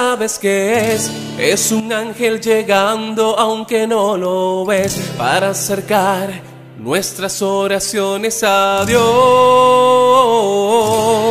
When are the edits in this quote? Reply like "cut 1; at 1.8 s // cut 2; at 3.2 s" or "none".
cut 1; at 1.8 s